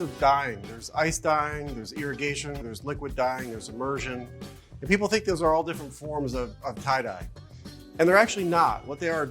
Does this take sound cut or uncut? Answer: cut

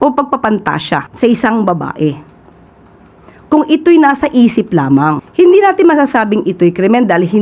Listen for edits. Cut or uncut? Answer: cut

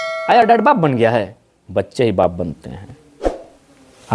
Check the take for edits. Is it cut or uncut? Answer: uncut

